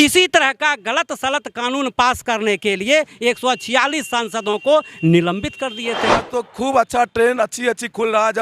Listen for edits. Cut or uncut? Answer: cut